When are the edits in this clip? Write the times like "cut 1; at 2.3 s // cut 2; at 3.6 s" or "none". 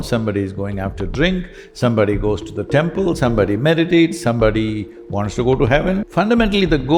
cut 1; at 6.1 s